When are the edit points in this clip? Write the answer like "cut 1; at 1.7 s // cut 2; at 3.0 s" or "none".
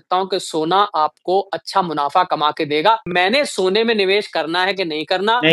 cut 1; at 3.1 s